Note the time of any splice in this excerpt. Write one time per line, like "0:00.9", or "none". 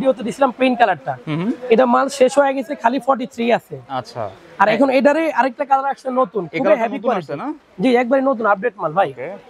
none